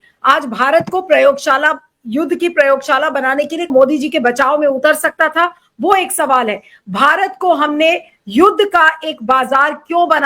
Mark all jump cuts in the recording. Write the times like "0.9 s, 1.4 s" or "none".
3.7 s